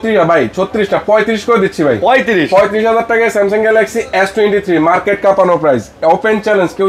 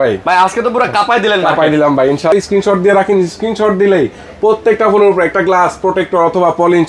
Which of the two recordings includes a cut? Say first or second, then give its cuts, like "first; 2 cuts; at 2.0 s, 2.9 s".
second; 1 cut; at 2.3 s